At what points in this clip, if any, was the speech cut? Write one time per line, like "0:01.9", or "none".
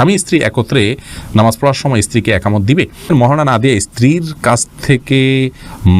0:03.1